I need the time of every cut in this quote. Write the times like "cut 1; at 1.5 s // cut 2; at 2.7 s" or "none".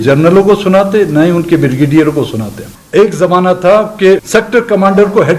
cut 1; at 2.7 s // cut 2; at 4.2 s